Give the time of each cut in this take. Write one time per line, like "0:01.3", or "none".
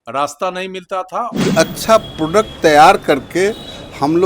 0:01.3